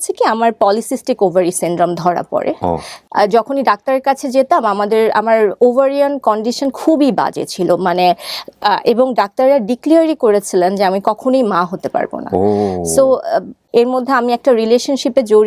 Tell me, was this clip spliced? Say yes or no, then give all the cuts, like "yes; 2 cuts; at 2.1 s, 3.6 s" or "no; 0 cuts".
yes; 2 cuts; at 2.9 s, 13.6 s